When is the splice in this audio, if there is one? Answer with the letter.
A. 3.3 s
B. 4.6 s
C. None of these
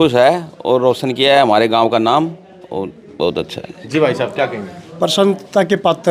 C